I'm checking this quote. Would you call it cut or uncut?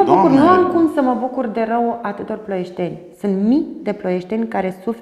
uncut